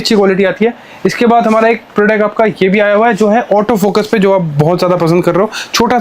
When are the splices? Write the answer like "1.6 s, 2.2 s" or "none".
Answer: none